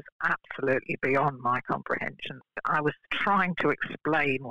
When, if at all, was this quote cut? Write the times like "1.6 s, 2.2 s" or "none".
2.4 s